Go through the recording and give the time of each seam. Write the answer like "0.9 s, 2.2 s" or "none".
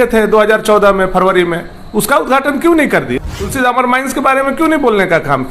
3.2 s